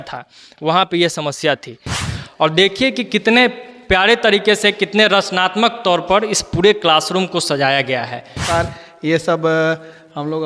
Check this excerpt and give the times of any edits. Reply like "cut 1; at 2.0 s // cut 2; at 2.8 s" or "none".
cut 1; at 2.0 s // cut 2; at 8.4 s